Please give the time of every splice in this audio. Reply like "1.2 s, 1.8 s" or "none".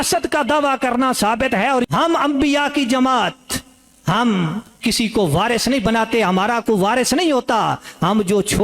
1.9 s